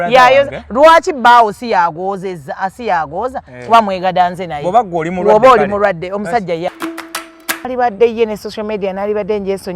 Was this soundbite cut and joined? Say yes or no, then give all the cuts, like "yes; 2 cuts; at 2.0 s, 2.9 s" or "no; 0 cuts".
yes; 1 cut; at 7.1 s